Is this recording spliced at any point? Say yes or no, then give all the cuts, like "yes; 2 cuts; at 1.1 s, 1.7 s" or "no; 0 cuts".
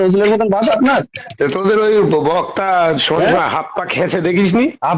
no; 0 cuts